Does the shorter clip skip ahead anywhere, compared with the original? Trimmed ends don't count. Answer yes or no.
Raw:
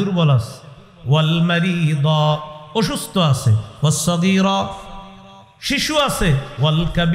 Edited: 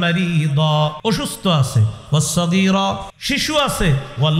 yes